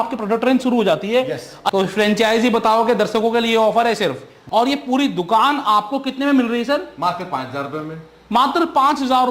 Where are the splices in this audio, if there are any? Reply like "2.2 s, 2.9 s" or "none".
1.5 s, 4.3 s

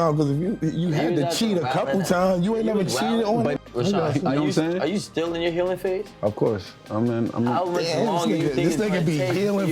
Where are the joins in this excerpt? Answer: 3.6 s

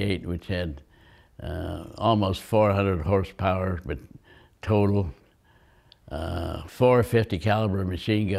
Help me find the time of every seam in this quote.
none

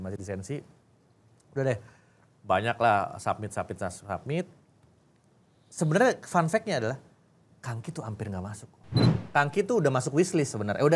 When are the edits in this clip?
9.2 s

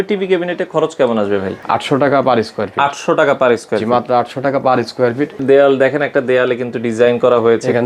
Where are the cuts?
1.5 s, 5.4 s

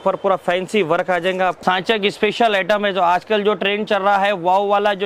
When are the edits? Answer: 1.6 s

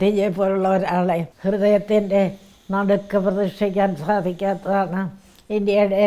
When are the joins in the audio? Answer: 1.3 s

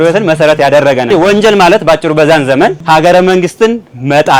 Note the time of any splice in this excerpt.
1.1 s, 2.8 s

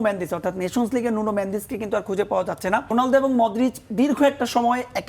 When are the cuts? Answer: 2.9 s

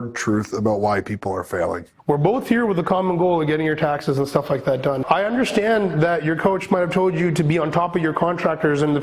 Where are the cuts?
1.9 s, 5.0 s

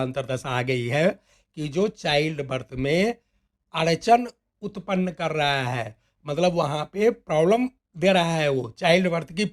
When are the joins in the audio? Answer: none

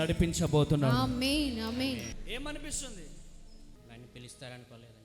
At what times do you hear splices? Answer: 2.1 s, 3.7 s

